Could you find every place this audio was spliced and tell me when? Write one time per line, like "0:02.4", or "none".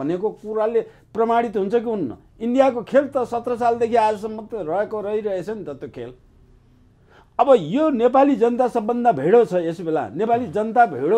none

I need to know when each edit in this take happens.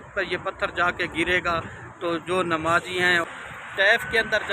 0:03.2

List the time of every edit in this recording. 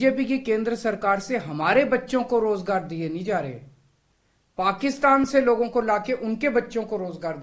none

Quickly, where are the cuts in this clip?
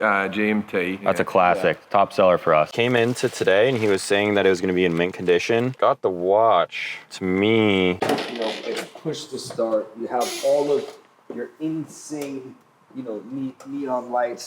0:02.7
0:08.0

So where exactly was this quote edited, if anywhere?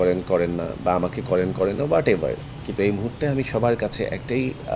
none

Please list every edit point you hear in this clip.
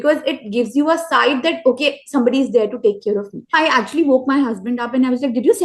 0:03.5

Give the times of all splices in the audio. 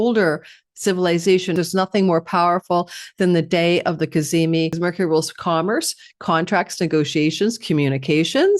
0:01.5
0:04.7

